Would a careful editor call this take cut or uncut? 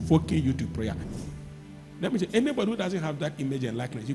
cut